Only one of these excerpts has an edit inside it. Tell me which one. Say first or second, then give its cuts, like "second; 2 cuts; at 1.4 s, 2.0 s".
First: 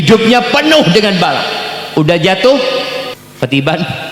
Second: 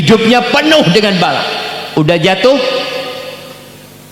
first; 1 cut; at 3.2 s